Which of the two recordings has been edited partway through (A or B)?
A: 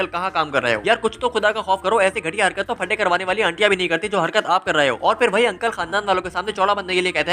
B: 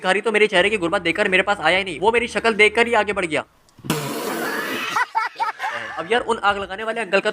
B